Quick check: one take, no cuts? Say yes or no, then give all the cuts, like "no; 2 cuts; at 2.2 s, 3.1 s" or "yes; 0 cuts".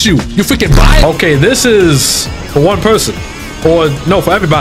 no; 1 cut; at 1.0 s